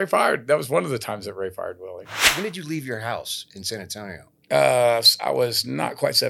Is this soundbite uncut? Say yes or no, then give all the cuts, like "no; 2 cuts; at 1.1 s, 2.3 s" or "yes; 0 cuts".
no; 1 cut; at 2.3 s